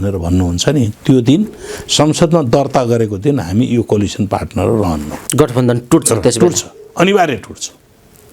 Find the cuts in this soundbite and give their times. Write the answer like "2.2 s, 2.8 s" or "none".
5.2 s